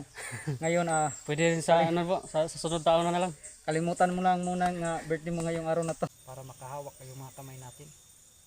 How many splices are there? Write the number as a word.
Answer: one